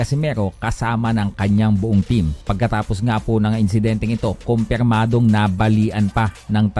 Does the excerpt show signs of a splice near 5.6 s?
no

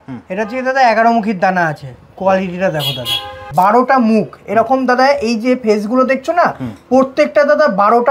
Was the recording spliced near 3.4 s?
yes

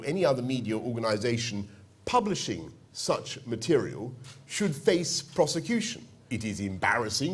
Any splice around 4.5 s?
no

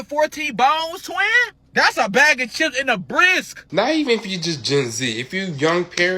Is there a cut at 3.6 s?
yes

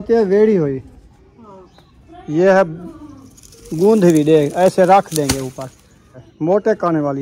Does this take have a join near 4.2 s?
no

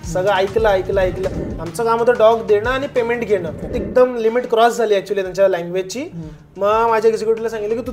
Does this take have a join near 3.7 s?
yes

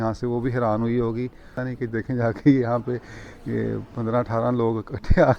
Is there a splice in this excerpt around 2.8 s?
no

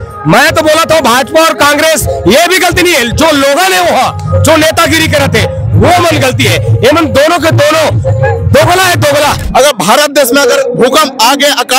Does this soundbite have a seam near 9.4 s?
yes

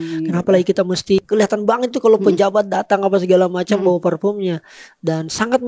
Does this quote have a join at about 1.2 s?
yes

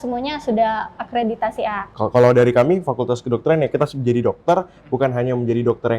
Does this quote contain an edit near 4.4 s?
no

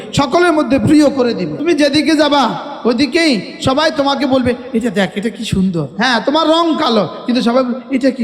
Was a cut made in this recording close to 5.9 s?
yes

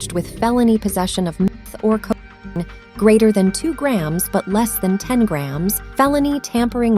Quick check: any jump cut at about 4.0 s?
no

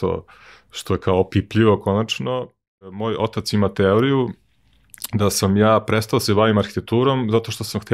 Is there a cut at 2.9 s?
yes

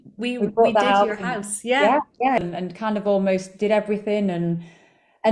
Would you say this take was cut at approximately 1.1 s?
no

